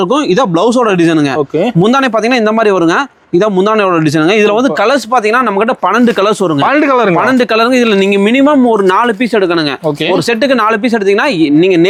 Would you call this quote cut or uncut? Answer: uncut